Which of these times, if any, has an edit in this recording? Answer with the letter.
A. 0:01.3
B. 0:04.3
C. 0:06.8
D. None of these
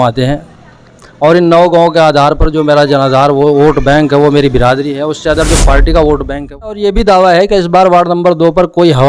C